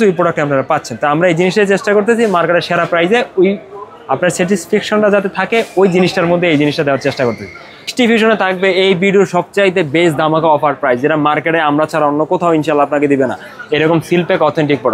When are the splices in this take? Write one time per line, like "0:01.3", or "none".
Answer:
0:07.9